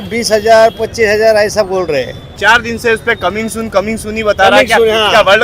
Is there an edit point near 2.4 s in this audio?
yes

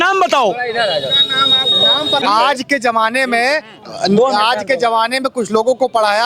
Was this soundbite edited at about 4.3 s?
no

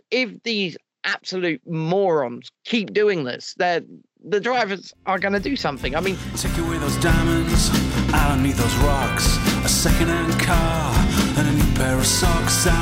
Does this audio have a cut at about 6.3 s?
yes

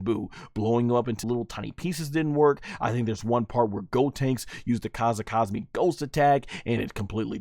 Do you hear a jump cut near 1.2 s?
yes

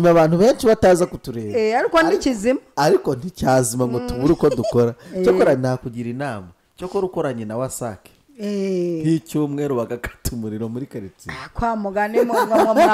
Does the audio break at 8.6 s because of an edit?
no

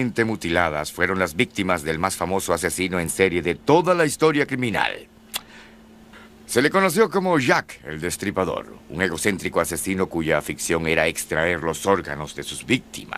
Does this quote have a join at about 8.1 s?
no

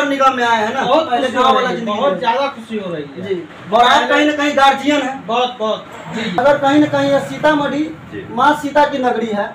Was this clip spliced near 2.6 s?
no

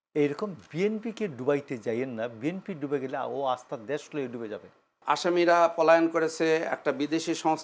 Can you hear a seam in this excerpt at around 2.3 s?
no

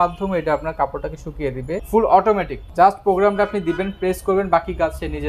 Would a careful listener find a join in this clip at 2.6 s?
yes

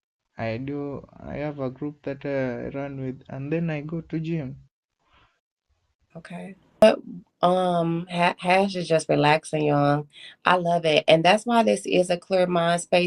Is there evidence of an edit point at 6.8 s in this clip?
yes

